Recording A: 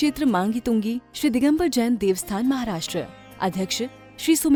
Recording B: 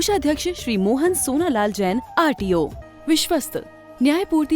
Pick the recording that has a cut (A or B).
B